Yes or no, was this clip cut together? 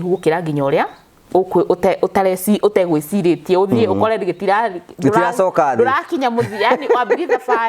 no